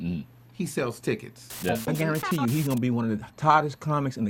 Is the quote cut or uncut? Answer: cut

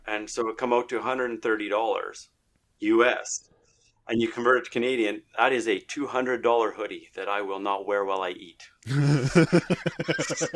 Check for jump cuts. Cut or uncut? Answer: uncut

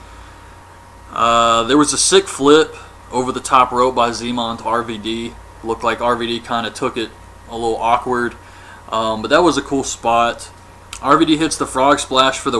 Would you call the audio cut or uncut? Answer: cut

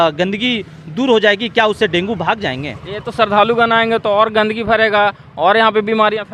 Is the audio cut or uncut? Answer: uncut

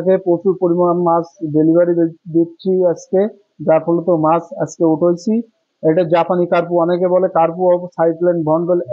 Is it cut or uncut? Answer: uncut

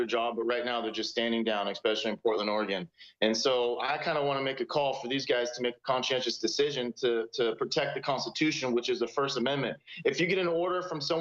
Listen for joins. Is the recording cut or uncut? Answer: uncut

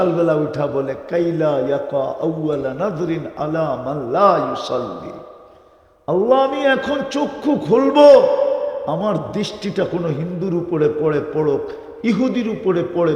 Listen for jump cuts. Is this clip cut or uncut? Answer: uncut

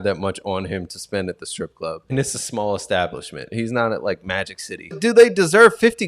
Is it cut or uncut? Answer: cut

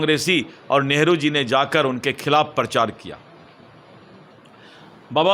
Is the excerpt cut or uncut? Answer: uncut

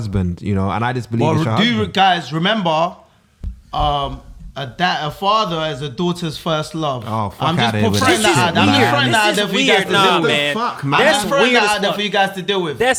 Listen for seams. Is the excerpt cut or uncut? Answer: uncut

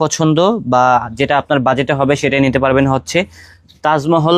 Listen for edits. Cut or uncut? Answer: uncut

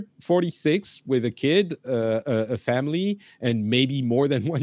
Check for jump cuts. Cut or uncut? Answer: uncut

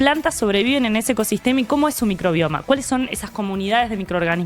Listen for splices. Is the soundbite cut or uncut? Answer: uncut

